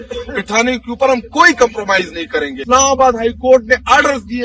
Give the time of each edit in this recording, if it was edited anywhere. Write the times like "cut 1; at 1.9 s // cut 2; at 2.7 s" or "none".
cut 1; at 2.6 s